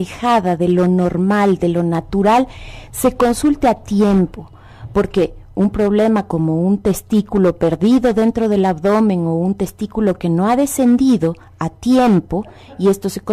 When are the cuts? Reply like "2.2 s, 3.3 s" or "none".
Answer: 3.4 s